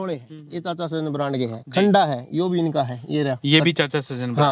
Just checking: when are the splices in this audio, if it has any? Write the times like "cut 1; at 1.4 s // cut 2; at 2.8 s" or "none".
none

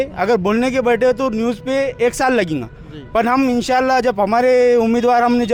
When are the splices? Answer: none

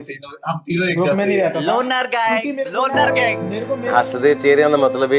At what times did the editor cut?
cut 1; at 3.8 s

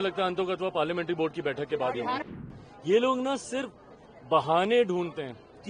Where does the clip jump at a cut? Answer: cut 1; at 2.3 s

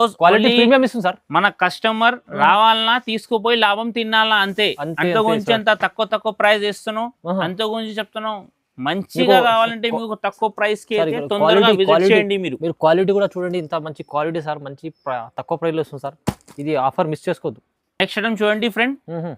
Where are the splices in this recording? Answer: none

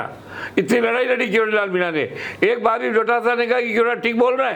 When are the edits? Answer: none

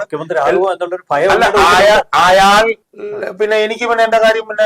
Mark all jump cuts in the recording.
cut 1; at 2.9 s

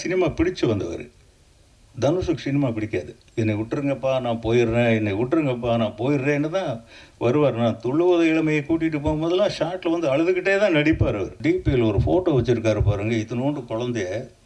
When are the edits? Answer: cut 1; at 3.2 s // cut 2; at 11.4 s

